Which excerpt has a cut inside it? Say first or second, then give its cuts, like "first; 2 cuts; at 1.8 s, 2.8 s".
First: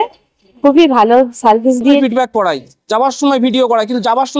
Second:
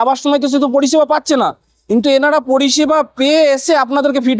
first; 1 cut; at 2.0 s